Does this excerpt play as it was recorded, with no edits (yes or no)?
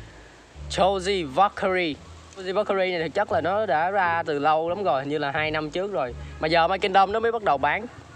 no